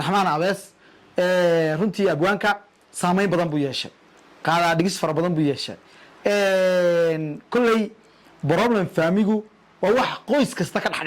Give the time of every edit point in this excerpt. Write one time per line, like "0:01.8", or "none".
none

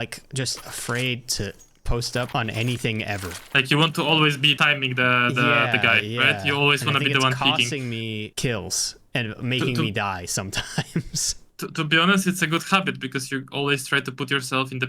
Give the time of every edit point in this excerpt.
0:02.3
0:03.4
0:04.6
0:08.3

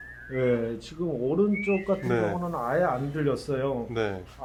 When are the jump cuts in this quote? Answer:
none

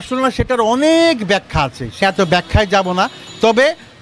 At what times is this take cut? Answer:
0:02.0

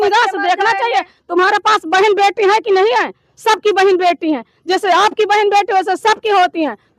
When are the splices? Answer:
none

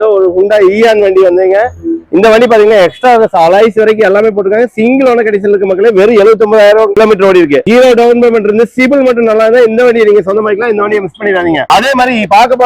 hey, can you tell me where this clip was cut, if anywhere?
none

